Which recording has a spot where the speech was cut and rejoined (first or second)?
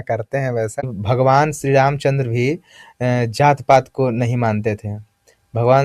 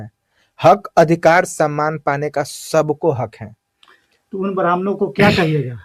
first